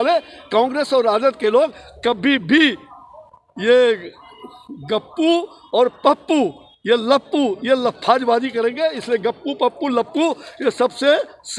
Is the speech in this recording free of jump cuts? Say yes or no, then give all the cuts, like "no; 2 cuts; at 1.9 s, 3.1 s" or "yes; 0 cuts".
yes; 0 cuts